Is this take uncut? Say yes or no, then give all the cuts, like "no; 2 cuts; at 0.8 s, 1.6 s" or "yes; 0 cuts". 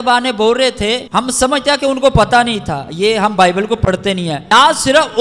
no; 2 cuts; at 1.0 s, 4.4 s